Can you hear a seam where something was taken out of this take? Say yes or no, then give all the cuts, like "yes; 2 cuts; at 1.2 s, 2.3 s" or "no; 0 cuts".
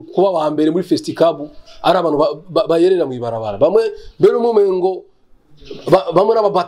no; 0 cuts